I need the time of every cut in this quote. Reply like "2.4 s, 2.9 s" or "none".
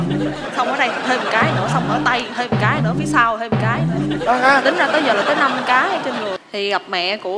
6.4 s